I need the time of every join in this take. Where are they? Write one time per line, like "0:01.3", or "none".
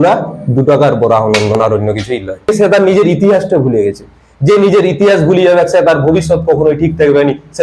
0:02.5